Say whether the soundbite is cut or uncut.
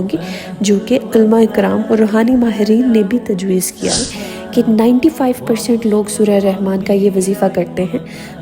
cut